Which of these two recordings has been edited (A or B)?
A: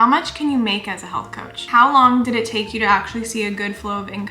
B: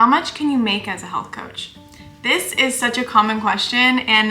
A